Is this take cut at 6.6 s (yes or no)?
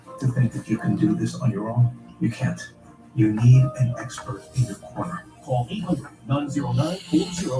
no